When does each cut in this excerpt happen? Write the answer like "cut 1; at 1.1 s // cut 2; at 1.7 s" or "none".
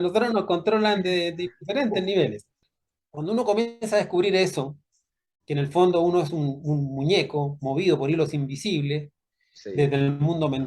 cut 1; at 2.5 s